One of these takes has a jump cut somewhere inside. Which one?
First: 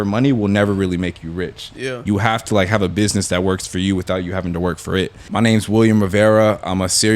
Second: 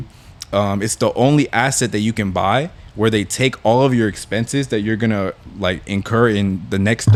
first; 1 cut; at 5.2 s

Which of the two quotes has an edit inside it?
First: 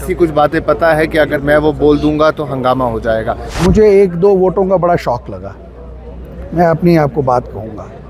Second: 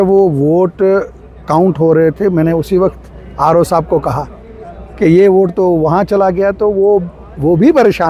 first; 1 cut; at 3.4 s

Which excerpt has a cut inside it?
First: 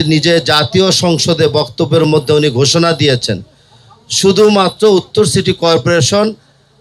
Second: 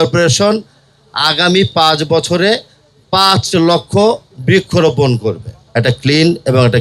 second; 1 cut; at 5.6 s

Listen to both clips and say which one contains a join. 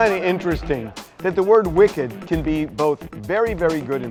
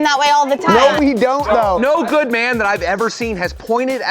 second; 1 cut; at 1.8 s

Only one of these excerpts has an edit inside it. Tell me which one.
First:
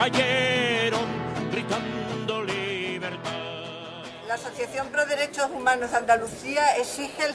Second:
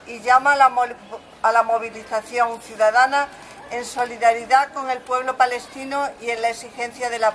first; 1 cut; at 5.6 s

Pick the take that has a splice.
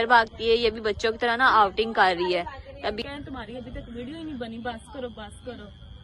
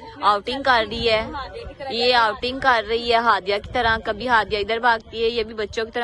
first; 1 cut; at 3.0 s

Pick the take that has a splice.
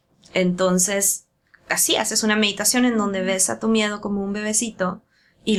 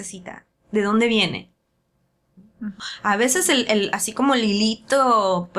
second; 1 cut; at 2.8 s

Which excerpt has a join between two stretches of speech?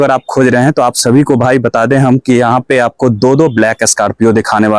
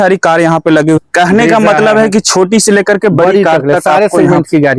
second; 1 cut; at 1.0 s

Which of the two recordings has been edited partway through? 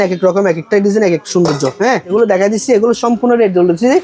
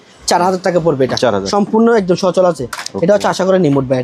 first; 1 cut; at 2.1 s

